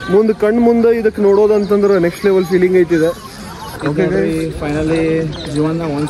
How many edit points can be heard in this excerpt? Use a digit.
1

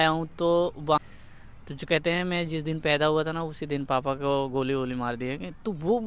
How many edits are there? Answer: 1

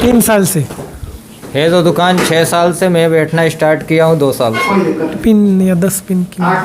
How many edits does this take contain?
1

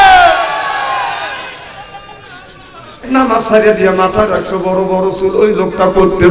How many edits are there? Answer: 1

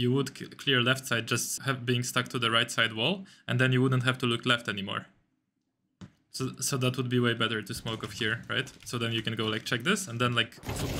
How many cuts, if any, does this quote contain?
1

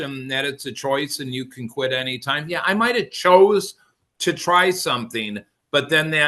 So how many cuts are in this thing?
0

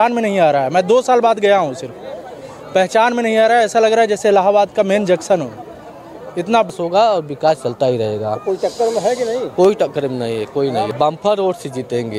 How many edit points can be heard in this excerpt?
2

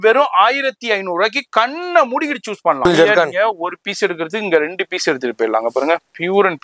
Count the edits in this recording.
1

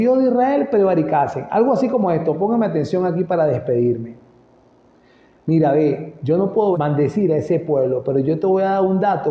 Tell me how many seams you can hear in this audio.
0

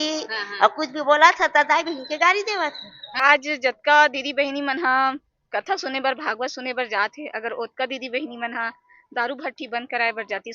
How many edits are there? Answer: 1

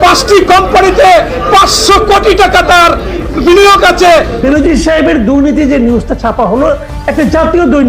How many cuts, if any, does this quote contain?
1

